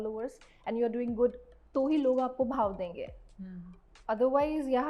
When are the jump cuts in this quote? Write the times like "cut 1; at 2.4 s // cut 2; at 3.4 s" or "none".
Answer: cut 1; at 1.5 s

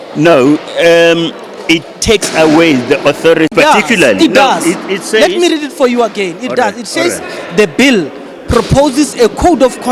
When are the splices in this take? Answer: cut 1; at 3.5 s

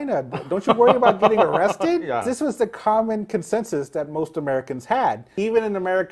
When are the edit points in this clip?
cut 1; at 2.3 s // cut 2; at 5.3 s

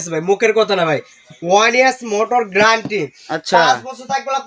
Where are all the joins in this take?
none

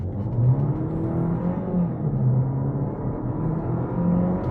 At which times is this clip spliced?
none

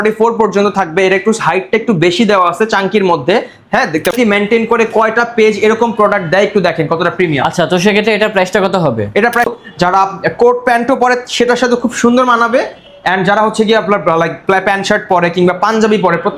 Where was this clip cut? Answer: cut 1; at 4.1 s // cut 2; at 9.5 s

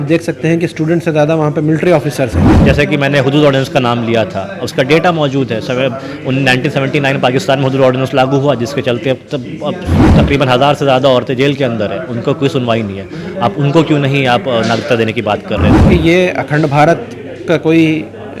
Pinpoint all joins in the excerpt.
cut 1; at 2.5 s // cut 2; at 15.8 s

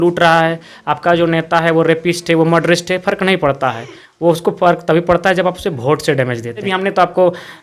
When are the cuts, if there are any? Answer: cut 1; at 6.7 s

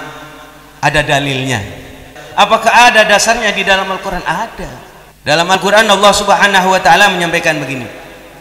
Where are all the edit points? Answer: cut 1; at 2.2 s // cut 2; at 5.5 s

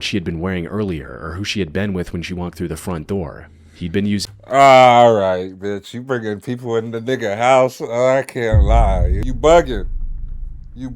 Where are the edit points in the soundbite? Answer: cut 1; at 9.2 s

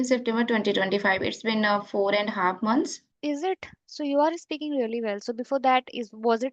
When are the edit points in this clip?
cut 1; at 3.1 s

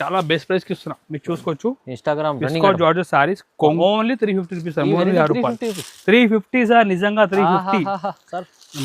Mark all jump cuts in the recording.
cut 1; at 3.8 s

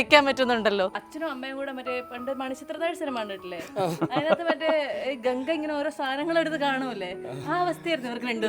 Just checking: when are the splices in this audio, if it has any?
cut 1; at 1.0 s

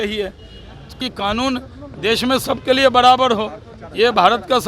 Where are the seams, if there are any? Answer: cut 1; at 1.0 s

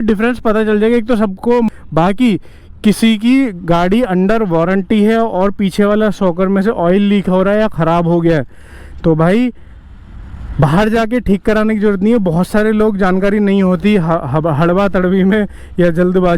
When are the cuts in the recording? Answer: cut 1; at 1.7 s

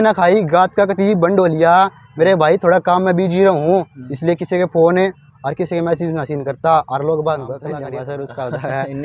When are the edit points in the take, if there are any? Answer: cut 1; at 7.8 s

